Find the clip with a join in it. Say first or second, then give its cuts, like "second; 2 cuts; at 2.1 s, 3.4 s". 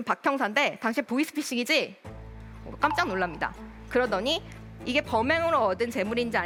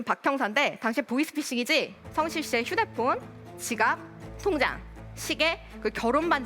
second; 1 cut; at 2.0 s